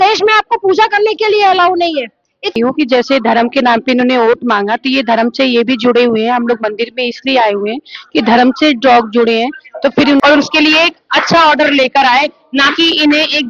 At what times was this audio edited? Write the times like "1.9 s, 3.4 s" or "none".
2.6 s, 10.2 s